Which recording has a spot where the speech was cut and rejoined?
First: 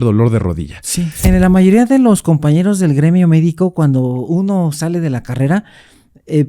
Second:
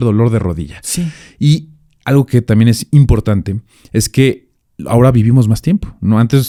first; 1 cut; at 1.3 s

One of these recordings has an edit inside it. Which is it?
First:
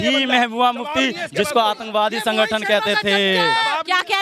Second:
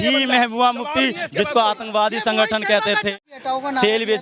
second; 1 cut; at 3.2 s

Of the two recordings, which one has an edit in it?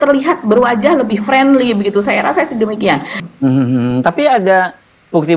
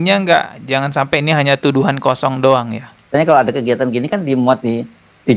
first; 1 cut; at 3.1 s

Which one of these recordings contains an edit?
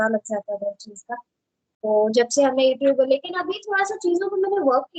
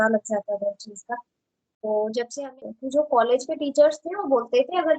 second; 1 cut; at 2.4 s

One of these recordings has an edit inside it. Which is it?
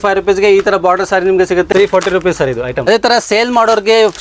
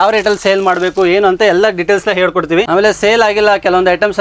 first; 2 cuts; at 1.7 s, 2.8 s

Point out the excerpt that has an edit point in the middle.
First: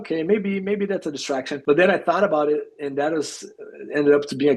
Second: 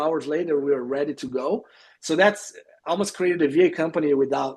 first; 1 cut; at 1.5 s

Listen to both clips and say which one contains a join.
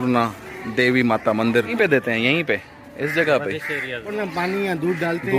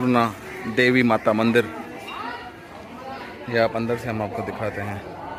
first; 2 cuts; at 1.8 s, 4.1 s

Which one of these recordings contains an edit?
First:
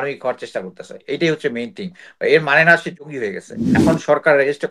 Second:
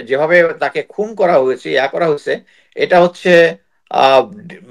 first; 1 cut; at 3.8 s

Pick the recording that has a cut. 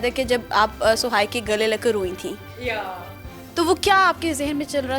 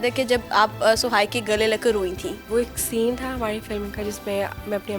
second; 1 cut; at 2.4 s

